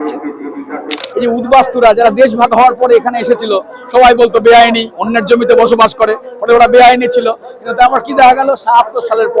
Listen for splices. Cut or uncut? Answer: cut